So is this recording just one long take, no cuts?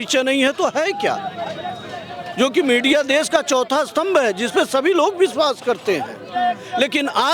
yes; 0 cuts

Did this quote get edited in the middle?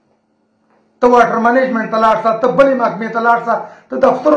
no; 0 cuts

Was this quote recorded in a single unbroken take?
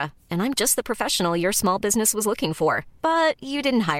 yes; 0 cuts

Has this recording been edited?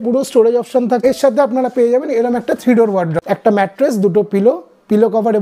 yes; 2 cuts; at 1.0 s, 3.2 s

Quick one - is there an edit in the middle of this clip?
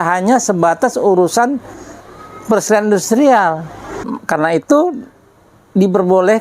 yes; 1 cut; at 4.2 s

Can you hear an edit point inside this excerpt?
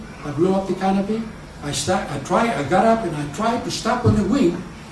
yes; 1 cut; at 2.5 s

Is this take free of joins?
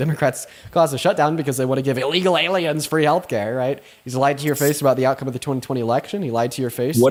yes; 0 cuts

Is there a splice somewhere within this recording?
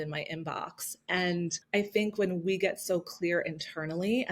yes; 1 cut; at 1.6 s

